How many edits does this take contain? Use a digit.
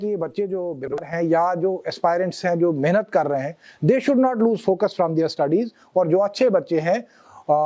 1